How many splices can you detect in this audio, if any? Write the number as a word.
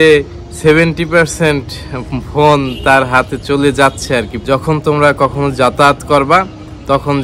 one